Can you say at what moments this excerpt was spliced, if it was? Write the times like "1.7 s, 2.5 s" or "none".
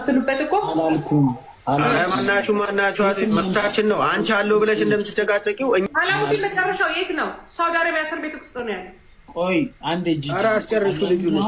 5.8 s